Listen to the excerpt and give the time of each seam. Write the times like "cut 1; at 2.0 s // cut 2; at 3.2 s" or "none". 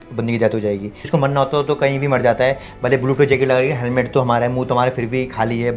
cut 1; at 1.0 s